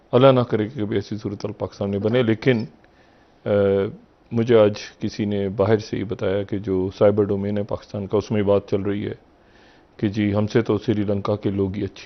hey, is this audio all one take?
yes; 0 cuts

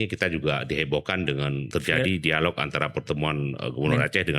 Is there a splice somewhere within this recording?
yes; 1 cut; at 1.6 s

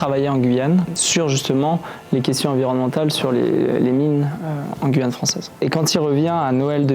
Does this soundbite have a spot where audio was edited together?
yes; 2 cuts; at 0.9 s, 5.6 s

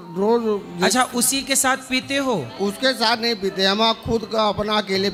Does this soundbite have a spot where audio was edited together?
no; 0 cuts

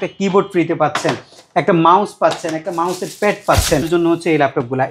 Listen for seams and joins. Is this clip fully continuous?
no; 1 cut; at 3.9 s

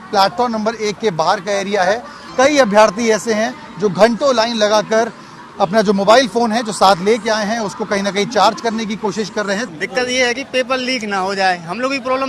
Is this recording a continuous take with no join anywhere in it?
no; 2 cuts; at 2.2 s, 9.6 s

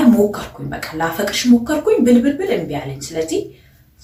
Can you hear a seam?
no; 0 cuts

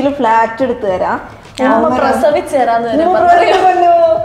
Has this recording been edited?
no; 0 cuts

